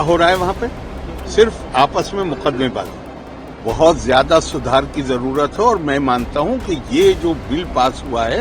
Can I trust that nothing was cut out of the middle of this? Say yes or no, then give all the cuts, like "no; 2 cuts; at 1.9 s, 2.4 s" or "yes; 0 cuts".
no; 1 cut; at 3.5 s